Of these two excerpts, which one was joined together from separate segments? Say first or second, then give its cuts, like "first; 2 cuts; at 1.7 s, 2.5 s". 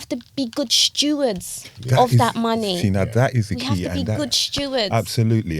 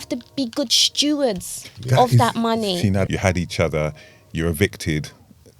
second; 1 cut; at 3.1 s